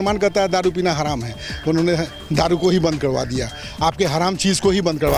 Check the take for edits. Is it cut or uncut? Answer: uncut